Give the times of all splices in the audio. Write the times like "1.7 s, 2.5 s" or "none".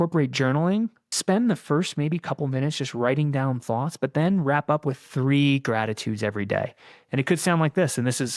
1.1 s